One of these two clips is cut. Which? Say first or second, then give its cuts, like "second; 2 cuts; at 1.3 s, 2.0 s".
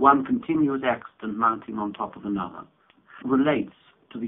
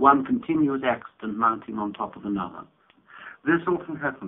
second; 1 cut; at 3.2 s